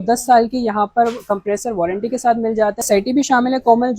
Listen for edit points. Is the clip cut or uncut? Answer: cut